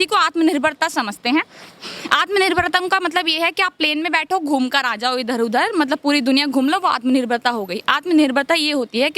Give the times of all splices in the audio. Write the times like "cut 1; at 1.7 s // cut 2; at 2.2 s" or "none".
none